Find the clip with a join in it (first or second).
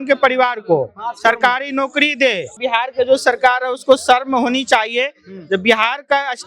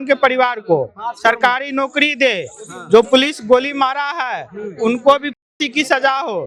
first